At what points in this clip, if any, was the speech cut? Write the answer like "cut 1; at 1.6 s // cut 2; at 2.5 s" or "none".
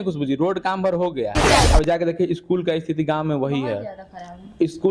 cut 1; at 1.6 s